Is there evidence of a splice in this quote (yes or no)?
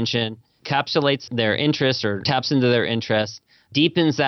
yes